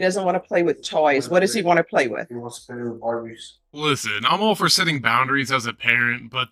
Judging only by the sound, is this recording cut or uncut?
uncut